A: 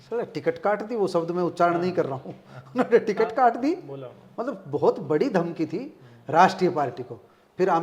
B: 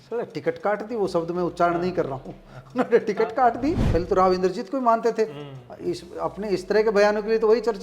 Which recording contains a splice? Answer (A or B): B